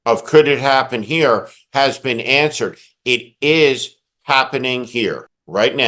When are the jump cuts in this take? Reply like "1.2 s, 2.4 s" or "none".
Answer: none